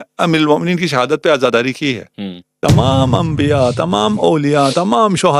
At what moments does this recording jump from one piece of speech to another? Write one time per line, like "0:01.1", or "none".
0:02.4